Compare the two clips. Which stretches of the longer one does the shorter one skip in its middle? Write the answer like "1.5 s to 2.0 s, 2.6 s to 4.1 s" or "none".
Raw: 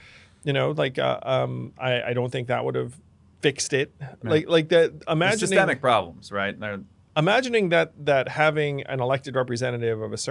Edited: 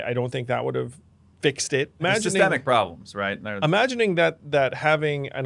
4.0 s to 5.2 s, 6.6 s to 7.0 s